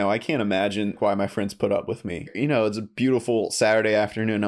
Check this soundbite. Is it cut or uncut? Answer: cut